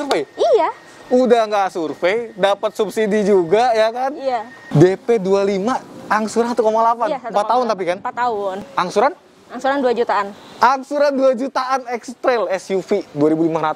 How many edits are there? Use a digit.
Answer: 2